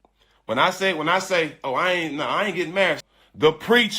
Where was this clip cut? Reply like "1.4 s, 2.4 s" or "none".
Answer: 3.0 s